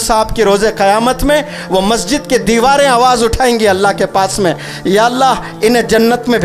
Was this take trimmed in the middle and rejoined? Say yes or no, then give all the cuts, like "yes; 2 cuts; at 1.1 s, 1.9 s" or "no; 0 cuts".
no; 0 cuts